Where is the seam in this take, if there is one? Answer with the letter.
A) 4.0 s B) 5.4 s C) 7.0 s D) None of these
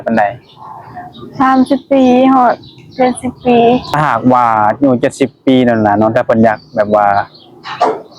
A